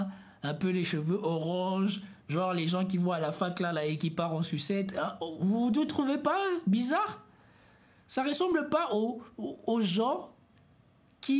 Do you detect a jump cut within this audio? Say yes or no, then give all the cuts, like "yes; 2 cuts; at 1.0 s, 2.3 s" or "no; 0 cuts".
no; 0 cuts